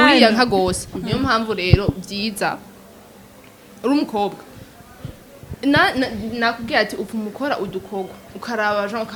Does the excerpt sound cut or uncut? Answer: uncut